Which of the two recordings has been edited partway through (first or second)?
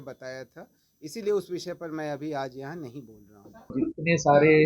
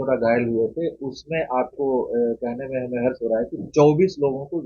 first